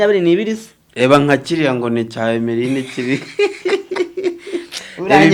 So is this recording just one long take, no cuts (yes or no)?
yes